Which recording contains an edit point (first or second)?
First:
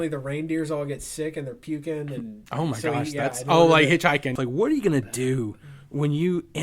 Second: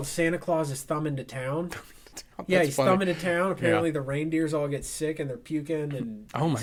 first